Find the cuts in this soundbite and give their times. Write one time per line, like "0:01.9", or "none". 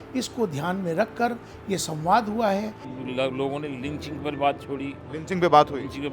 0:02.9